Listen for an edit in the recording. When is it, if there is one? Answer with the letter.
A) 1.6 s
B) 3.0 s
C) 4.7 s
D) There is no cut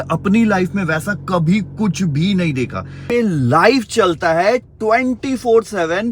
B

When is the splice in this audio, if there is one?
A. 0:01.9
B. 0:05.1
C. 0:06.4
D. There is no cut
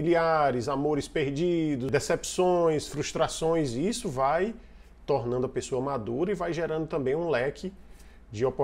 A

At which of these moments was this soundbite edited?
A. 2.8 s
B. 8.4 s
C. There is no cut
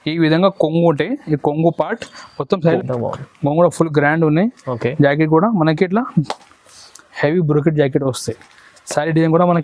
A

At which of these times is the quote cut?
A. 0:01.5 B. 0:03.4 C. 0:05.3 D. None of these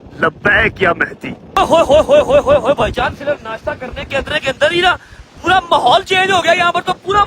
A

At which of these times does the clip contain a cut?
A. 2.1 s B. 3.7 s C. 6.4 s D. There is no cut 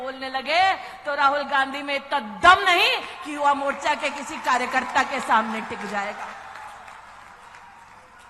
D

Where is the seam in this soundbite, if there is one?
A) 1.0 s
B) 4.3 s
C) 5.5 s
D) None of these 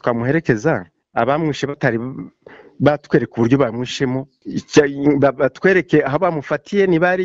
D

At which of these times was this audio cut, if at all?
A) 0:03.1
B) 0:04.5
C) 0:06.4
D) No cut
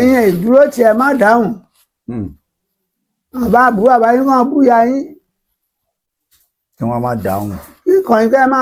D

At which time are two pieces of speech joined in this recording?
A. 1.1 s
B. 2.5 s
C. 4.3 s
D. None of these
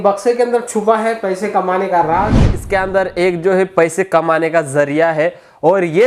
B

